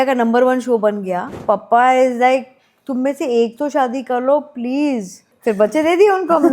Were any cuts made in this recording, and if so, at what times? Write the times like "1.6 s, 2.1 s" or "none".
1.3 s, 5.2 s